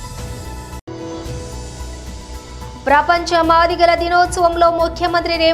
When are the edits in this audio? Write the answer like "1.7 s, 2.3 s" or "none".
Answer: 2.5 s